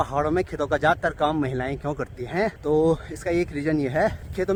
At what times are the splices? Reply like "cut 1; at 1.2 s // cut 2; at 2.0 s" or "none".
none